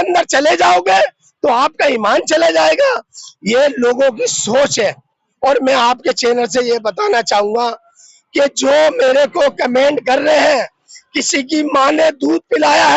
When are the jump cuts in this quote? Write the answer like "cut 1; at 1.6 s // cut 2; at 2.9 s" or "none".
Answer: none